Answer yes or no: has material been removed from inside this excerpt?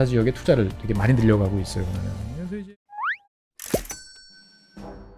yes